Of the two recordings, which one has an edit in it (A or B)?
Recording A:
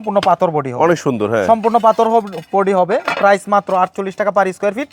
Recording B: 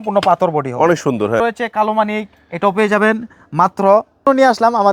B